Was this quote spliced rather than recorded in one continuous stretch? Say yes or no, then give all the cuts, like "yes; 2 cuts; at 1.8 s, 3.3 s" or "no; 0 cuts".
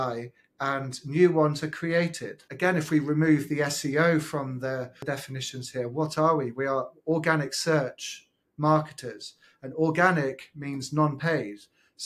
no; 0 cuts